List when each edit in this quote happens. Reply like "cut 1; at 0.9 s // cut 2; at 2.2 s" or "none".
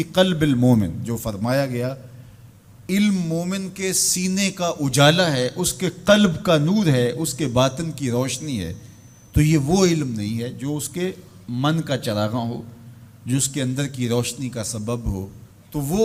none